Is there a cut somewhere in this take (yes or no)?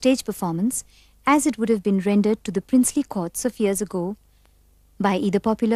yes